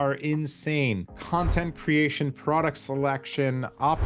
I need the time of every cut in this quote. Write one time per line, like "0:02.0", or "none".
0:01.1